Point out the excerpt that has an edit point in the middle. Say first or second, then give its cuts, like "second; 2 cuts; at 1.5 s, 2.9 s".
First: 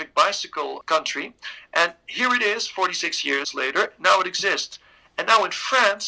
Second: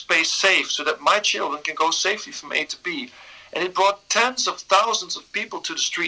first; 2 cuts; at 0.8 s, 3.5 s